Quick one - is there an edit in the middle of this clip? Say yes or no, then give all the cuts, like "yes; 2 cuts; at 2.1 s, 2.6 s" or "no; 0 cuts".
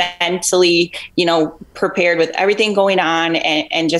no; 0 cuts